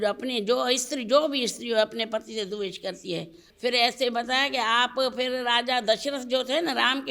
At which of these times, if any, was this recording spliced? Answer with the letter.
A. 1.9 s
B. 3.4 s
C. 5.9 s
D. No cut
B